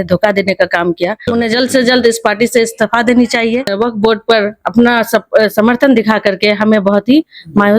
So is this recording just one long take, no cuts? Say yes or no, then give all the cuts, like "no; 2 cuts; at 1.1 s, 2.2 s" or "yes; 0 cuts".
no; 2 cuts; at 1.2 s, 3.7 s